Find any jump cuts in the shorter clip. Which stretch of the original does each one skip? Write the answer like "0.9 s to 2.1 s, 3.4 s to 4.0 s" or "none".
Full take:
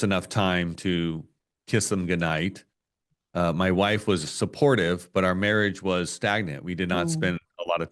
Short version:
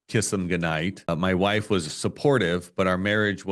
2.7 s to 3.5 s